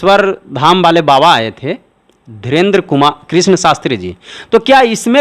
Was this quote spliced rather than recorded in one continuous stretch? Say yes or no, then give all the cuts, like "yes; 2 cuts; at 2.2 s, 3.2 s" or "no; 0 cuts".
no; 0 cuts